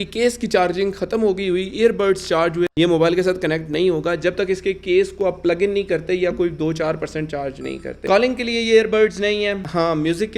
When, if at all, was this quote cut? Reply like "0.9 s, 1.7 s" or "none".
2.7 s, 8.0 s

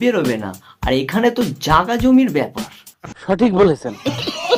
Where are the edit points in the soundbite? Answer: none

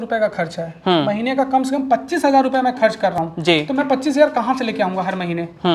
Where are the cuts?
none

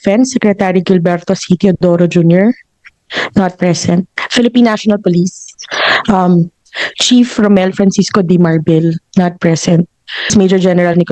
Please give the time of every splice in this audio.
4.2 s, 10.3 s

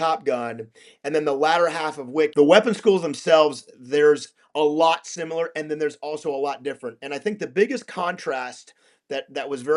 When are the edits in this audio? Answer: 2.3 s

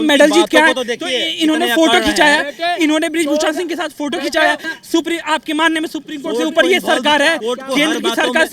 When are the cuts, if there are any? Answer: 4.7 s

